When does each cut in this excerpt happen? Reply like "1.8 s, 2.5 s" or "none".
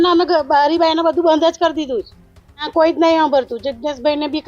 none